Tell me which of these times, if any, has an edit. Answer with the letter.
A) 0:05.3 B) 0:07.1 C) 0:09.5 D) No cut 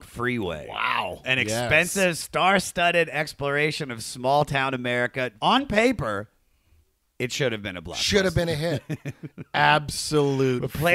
A